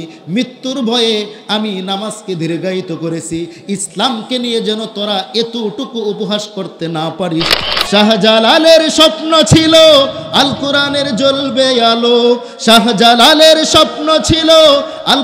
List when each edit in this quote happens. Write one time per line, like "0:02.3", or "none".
0:07.6